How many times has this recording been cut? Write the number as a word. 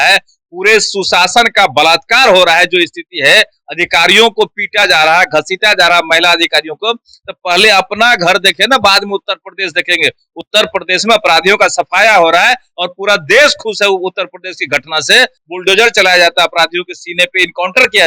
one